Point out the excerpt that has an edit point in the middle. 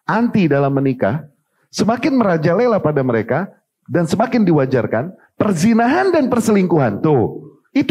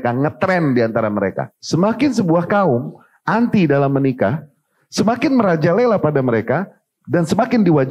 second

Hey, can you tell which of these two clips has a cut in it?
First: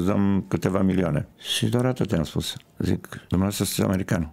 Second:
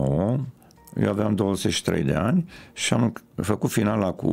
first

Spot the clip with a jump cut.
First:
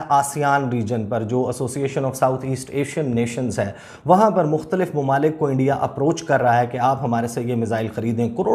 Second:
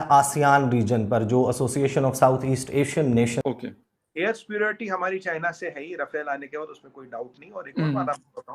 second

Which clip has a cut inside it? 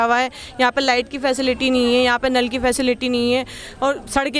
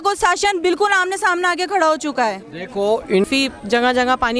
second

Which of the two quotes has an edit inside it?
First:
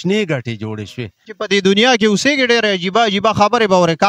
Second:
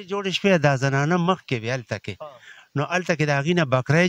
first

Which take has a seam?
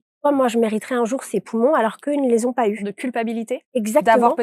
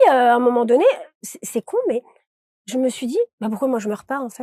first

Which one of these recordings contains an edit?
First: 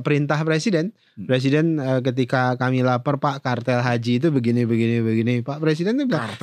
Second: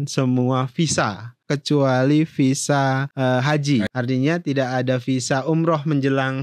second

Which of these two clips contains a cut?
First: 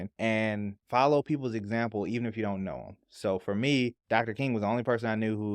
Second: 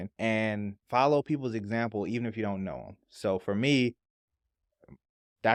first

